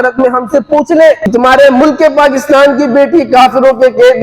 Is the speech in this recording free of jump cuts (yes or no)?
no